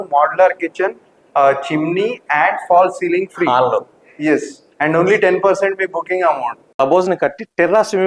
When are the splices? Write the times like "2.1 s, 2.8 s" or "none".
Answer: 6.8 s